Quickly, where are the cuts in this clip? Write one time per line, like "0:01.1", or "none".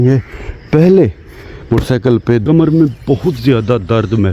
0:02.4